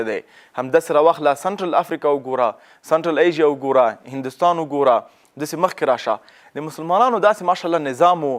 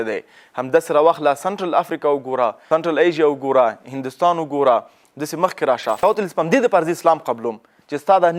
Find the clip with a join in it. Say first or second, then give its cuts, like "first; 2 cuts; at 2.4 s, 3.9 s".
second; 2 cuts; at 2.6 s, 6.0 s